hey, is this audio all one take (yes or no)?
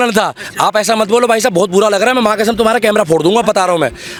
yes